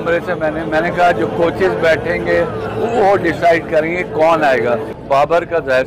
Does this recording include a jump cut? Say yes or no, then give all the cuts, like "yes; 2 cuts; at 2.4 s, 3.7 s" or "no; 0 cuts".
yes; 1 cut; at 4.9 s